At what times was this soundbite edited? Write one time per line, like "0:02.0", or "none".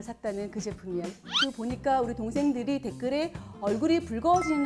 0:01.1